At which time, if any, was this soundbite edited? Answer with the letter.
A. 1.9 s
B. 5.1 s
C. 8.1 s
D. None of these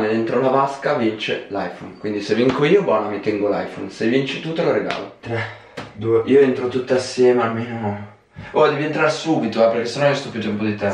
B